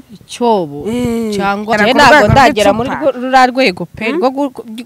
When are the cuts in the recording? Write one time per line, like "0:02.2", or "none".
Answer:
0:01.7